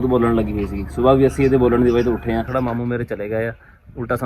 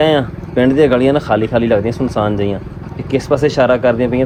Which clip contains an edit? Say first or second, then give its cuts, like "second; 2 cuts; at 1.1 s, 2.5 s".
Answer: first; 1 cut; at 2.5 s